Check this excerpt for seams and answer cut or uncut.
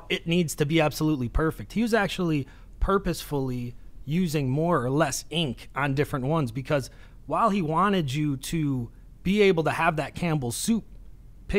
uncut